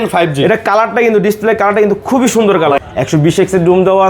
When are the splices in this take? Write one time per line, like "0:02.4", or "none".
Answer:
0:02.8